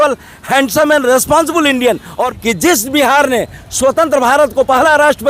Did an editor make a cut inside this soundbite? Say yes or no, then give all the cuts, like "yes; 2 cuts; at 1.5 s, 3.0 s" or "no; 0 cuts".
yes; 1 cut; at 2.3 s